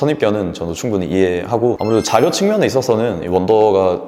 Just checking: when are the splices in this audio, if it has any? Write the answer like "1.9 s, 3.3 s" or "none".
1.8 s